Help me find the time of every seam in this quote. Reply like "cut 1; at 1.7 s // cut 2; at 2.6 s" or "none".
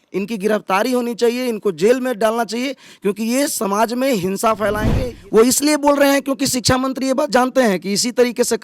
cut 1; at 5.0 s